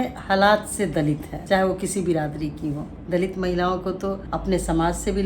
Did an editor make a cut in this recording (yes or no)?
yes